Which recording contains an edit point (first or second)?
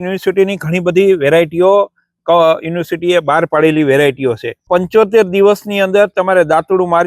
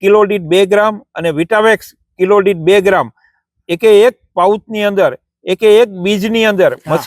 first